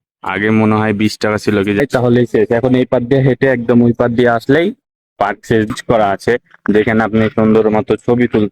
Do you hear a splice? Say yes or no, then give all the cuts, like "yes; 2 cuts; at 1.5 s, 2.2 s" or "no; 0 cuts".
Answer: yes; 2 cuts; at 1.8 s, 5.7 s